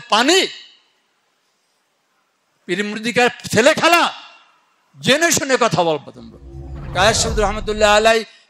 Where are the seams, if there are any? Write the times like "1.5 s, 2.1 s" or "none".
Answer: 6.8 s